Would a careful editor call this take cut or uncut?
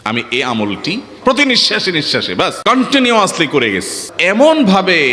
cut